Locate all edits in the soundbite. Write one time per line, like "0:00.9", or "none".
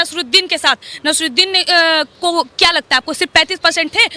0:01.0